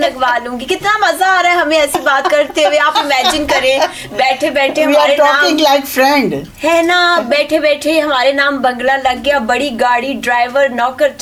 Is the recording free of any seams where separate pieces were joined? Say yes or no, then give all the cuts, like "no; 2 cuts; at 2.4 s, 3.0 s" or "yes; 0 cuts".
yes; 0 cuts